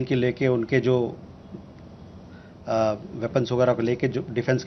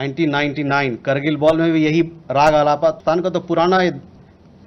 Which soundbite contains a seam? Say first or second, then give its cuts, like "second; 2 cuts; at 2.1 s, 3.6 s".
second; 1 cut; at 3.0 s